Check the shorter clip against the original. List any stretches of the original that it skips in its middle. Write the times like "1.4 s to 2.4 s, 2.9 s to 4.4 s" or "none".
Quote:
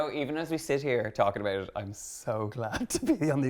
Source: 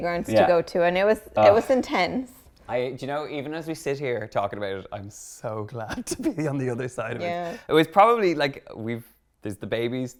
none